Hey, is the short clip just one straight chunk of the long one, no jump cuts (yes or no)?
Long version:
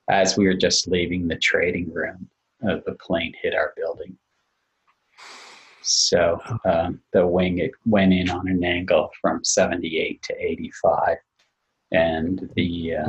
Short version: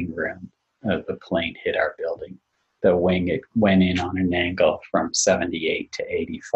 no